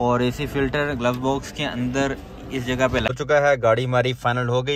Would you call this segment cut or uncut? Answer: cut